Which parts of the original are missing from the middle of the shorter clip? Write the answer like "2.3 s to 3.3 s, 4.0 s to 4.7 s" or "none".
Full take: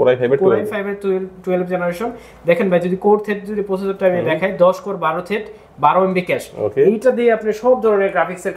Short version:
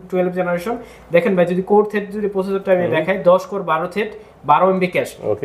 none

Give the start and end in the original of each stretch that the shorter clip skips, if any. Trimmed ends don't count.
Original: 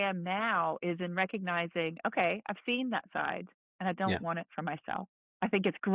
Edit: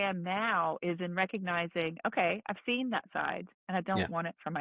3.5 s to 3.6 s

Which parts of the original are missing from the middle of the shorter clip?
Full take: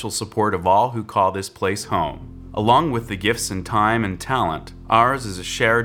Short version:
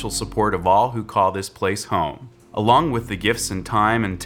none

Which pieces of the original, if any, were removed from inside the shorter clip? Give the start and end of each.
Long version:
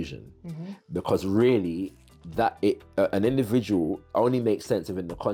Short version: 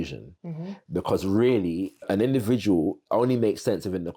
2.1 s to 3.1 s

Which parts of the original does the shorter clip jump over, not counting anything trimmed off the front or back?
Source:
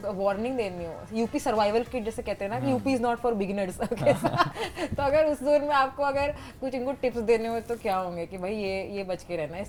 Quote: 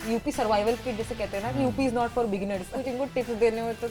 3.7 s to 6.5 s

